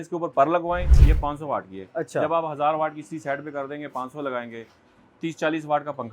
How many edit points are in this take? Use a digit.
1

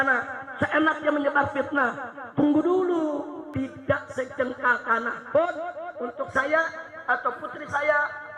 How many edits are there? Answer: 1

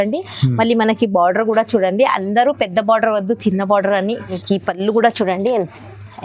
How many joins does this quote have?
1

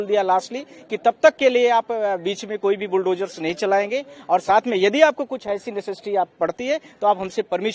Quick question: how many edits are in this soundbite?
0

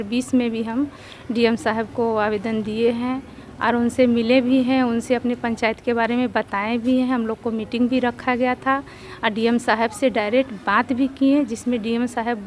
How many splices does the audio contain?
0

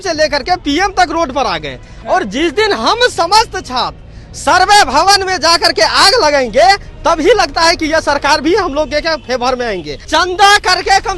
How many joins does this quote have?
1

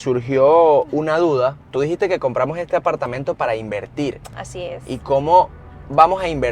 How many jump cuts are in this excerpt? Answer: 1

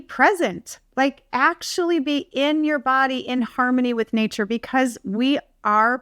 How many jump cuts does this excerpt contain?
0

